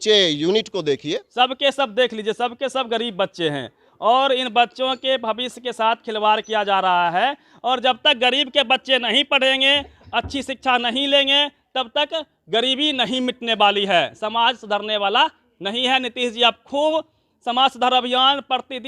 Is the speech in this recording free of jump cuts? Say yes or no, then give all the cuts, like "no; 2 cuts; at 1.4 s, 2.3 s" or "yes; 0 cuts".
no; 1 cut; at 1.3 s